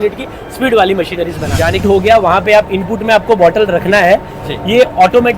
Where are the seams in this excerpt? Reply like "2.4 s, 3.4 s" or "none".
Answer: 1.8 s